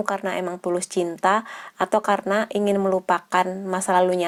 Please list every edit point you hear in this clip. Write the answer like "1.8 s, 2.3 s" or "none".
none